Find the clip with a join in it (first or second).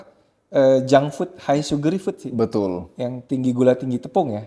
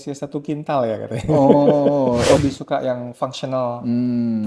second